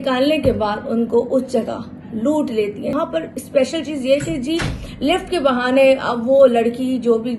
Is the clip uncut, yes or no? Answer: no